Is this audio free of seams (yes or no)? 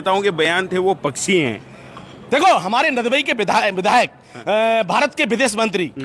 yes